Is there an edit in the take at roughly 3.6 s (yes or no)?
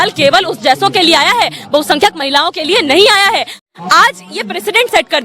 yes